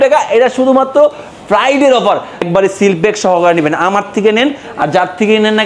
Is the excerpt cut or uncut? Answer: cut